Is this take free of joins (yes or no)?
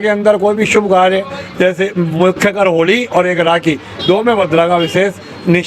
yes